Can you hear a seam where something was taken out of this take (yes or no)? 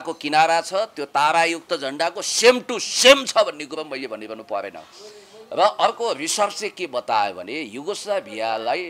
no